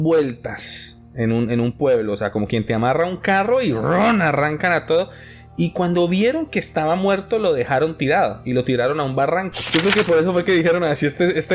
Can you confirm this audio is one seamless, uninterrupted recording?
no; 1 cut; at 9.7 s

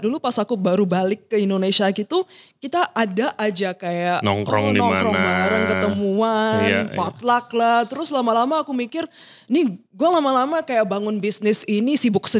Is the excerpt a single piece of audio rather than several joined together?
yes; 0 cuts

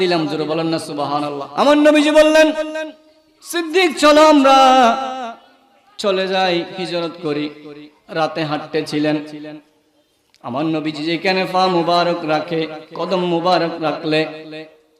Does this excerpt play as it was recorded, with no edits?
no; 1 cut; at 1.5 s

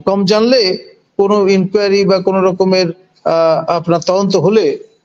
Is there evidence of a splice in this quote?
no; 0 cuts

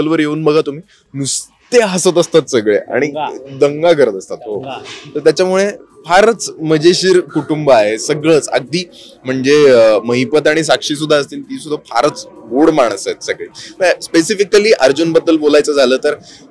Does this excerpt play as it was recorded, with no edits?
yes; 0 cuts

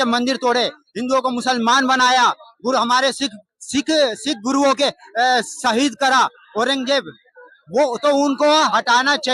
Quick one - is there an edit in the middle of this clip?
no; 0 cuts

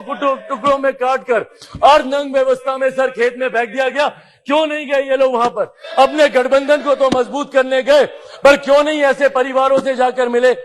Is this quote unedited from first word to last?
yes; 0 cuts

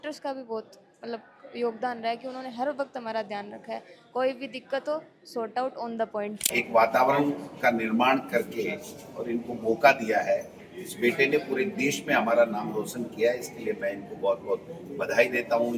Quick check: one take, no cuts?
no; 1 cut; at 6.4 s

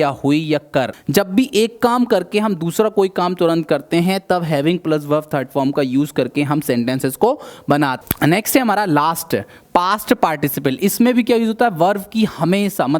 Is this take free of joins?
no; 2 cuts; at 0.9 s, 8.0 s

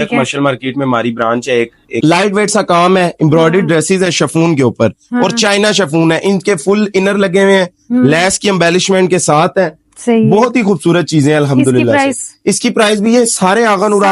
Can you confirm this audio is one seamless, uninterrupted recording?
no; 1 cut; at 1.9 s

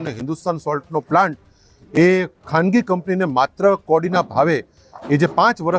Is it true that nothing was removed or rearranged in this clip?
yes; 0 cuts

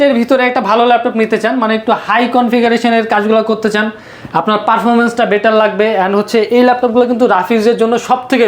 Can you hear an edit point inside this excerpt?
no; 0 cuts

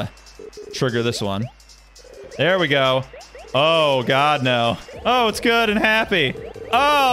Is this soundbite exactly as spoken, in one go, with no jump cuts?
yes; 0 cuts

